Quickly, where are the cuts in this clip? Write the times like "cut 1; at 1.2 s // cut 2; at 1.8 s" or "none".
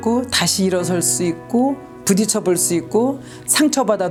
none